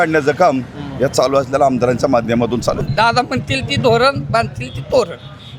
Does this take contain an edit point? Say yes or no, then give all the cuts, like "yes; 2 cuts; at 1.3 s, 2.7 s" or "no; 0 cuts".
yes; 1 cut; at 2.8 s